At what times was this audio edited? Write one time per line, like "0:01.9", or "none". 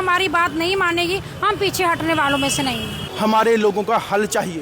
0:03.0

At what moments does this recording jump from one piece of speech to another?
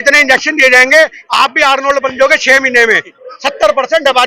0:03.1

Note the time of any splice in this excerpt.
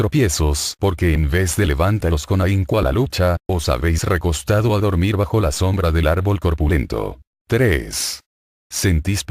none

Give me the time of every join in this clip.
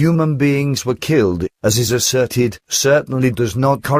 0:02.1

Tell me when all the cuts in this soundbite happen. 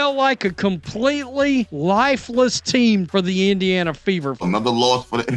0:01.7
0:03.1
0:04.4

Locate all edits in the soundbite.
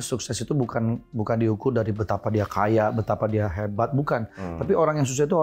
none

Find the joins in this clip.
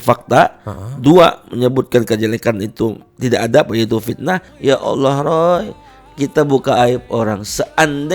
0:04.5

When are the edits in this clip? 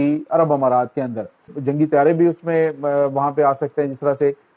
0:01.5

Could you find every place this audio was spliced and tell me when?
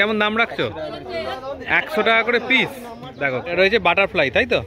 0:03.5

